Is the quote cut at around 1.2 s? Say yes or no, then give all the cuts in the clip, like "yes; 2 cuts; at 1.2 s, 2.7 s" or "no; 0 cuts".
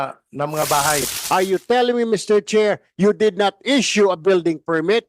yes; 1 cut; at 1.2 s